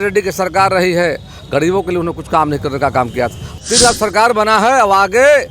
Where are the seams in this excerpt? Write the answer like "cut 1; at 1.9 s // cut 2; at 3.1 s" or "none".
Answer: cut 1; at 3.6 s